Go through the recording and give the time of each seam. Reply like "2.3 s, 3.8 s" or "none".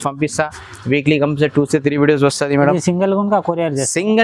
none